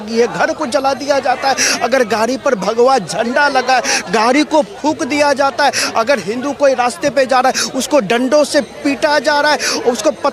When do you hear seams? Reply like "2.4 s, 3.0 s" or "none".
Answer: none